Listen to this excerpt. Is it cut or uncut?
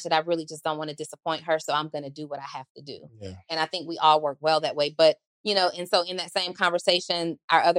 uncut